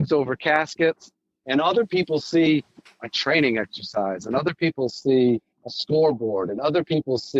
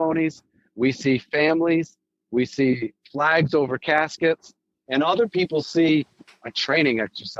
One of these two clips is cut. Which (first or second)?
first